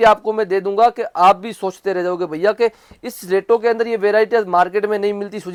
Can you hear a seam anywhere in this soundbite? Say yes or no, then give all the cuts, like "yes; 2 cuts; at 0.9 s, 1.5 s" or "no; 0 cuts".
no; 0 cuts